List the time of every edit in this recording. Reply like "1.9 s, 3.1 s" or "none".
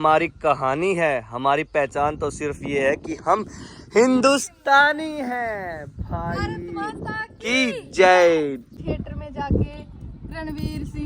8.7 s